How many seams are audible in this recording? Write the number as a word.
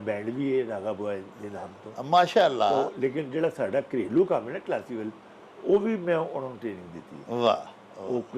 zero